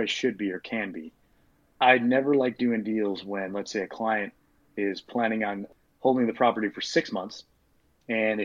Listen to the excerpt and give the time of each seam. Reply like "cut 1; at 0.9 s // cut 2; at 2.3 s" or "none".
cut 1; at 1.3 s // cut 2; at 5.7 s